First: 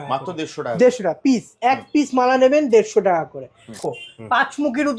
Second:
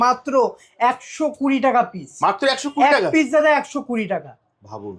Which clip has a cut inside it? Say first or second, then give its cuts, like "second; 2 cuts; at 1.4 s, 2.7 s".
first; 1 cut; at 3.7 s